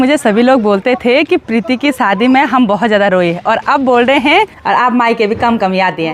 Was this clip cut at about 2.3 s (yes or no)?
no